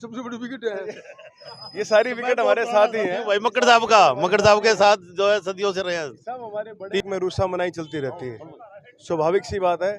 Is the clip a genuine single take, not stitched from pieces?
no; 1 cut; at 7.0 s

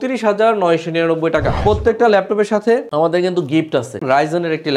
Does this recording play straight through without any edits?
no; 2 cuts; at 1.5 s, 4.0 s

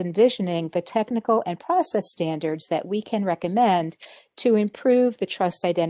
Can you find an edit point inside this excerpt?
no; 0 cuts

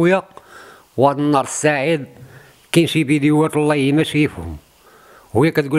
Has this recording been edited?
no; 0 cuts

